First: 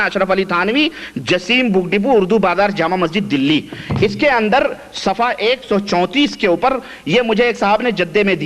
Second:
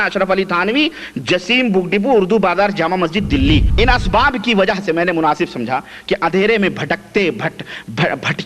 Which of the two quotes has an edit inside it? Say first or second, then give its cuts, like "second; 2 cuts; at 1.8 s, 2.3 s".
second; 1 cut; at 3.7 s